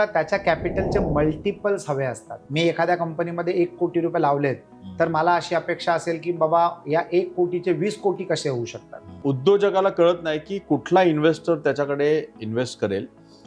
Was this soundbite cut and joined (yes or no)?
yes